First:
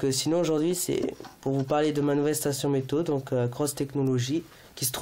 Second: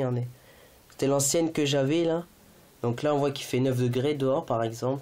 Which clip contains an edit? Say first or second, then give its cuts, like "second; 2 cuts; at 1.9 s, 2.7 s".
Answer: first; 1 cut; at 2.4 s